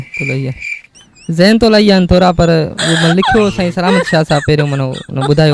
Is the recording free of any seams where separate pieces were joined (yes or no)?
yes